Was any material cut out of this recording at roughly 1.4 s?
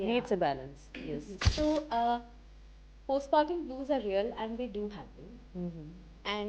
yes; 1 cut; at 1.4 s

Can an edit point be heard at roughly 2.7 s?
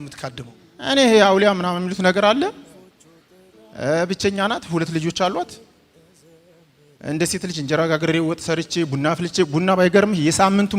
no; 0 cuts

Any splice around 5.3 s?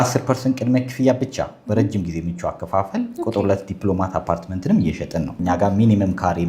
yes; 1 cut; at 5.3 s

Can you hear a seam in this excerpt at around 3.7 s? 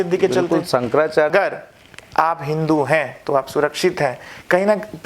no; 1 cut; at 1.3 s

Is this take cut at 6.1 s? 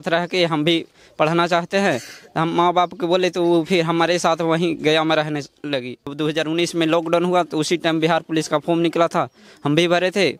yes; 1 cut; at 6.1 s

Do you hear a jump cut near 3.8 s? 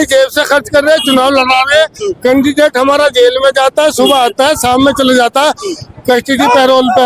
no; 0 cuts

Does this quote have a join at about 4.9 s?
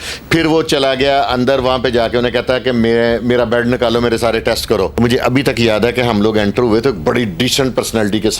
yes; 1 cut; at 4.9 s

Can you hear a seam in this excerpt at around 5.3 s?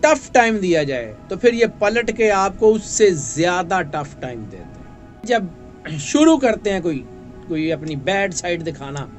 yes; 1 cut; at 5.3 s

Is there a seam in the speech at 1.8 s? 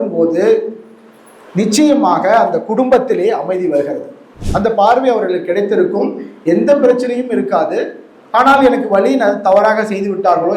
no; 1 cut; at 4.4 s

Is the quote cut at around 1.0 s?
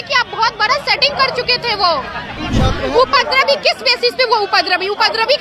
no; 1 cut; at 2.4 s

